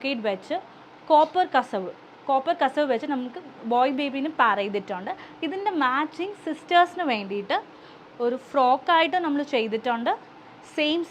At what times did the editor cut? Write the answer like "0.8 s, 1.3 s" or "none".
none